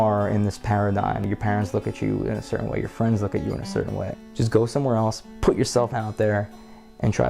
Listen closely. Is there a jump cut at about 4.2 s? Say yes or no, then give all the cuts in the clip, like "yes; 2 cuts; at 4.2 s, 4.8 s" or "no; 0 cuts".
yes; 2 cuts; at 1.2 s, 4.2 s